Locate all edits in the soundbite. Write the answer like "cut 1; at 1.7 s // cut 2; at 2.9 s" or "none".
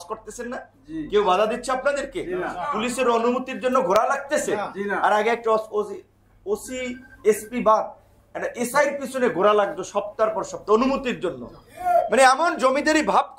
none